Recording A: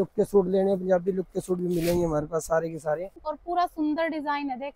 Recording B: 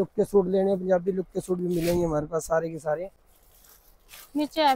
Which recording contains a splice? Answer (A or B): A